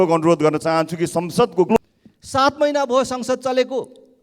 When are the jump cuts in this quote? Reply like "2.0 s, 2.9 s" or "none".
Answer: 1.7 s